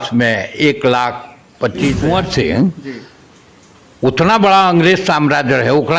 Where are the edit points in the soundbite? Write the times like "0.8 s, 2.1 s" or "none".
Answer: 2.0 s